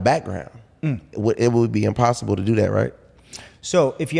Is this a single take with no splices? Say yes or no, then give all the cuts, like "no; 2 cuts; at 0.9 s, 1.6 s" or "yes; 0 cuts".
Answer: yes; 0 cuts